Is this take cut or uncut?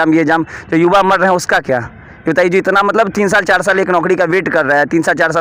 uncut